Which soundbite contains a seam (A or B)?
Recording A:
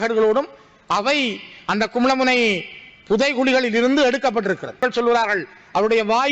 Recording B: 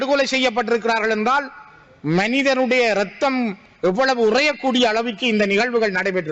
A